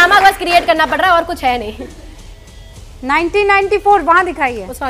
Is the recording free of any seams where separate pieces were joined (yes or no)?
yes